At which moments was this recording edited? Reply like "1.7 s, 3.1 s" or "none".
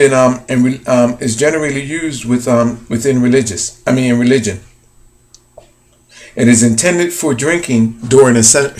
none